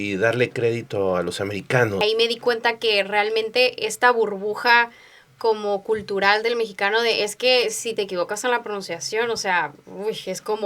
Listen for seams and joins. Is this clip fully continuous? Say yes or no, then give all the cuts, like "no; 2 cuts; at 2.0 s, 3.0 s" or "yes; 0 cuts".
no; 1 cut; at 2.0 s